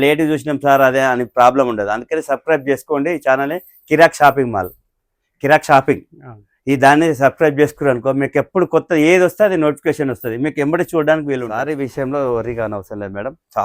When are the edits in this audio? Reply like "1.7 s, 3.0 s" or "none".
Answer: 11.6 s